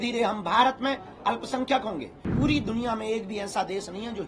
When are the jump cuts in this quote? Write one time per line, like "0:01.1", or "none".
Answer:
0:02.3